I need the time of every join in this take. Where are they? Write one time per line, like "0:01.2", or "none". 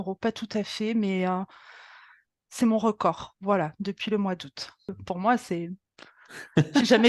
0:05.0